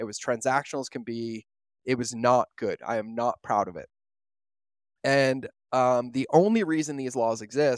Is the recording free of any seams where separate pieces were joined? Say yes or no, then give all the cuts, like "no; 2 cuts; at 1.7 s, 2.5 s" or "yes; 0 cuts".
yes; 0 cuts